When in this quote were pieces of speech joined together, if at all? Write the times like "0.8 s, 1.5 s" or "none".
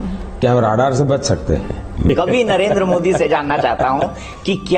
2.1 s